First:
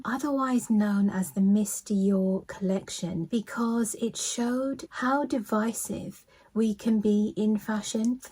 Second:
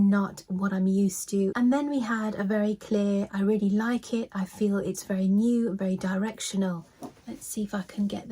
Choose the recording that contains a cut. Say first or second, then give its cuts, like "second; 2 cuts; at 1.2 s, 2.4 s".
second; 2 cuts; at 1.5 s, 6.8 s